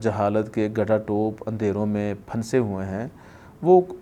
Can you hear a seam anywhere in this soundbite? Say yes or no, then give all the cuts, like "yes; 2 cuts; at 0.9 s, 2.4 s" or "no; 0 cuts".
no; 0 cuts